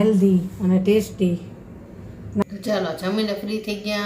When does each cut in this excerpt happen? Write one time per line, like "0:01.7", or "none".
0:02.4